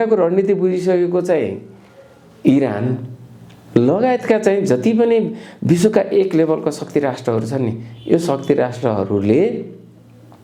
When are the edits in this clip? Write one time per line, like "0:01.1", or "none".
none